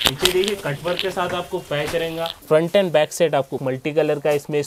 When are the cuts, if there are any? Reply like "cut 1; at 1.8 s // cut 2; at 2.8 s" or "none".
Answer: cut 1; at 2.4 s // cut 2; at 3.6 s